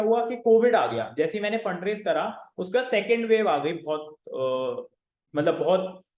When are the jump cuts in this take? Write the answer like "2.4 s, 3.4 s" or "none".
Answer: none